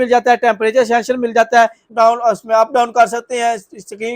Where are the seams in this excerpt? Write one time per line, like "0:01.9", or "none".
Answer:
0:01.8